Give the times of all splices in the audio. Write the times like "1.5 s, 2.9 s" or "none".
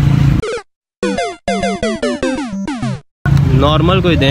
3.3 s

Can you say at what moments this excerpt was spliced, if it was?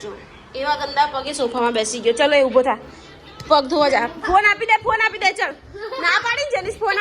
none

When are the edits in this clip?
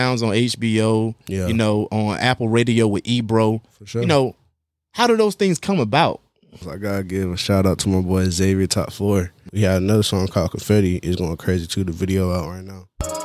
6.7 s, 9.4 s

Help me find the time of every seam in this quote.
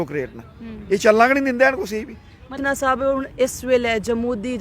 2.6 s

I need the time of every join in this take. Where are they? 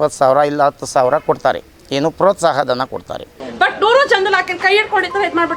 3.4 s

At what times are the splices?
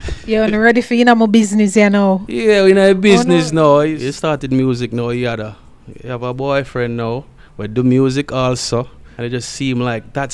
3.8 s, 9.0 s

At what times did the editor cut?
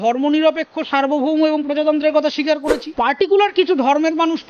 2.9 s

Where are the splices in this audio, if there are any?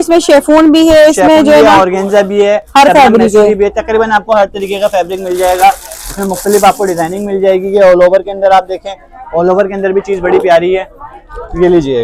none

